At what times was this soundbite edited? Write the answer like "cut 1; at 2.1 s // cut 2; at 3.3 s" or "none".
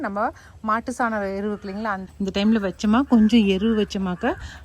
cut 1; at 2.0 s